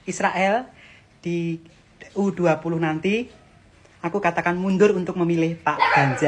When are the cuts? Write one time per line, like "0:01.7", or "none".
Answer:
none